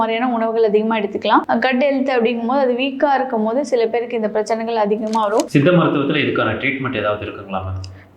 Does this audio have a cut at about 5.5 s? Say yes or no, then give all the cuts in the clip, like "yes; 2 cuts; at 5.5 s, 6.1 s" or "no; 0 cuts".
yes; 1 cut; at 5.5 s